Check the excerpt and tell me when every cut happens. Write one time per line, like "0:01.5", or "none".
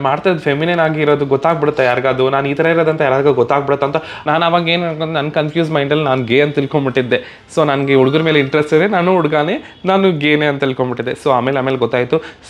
0:04.2